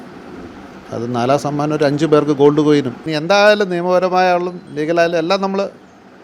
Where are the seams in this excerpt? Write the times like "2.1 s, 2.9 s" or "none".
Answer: 3.0 s